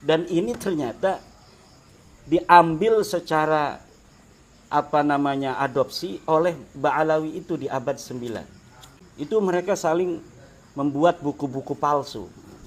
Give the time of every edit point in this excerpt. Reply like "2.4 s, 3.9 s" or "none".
9.4 s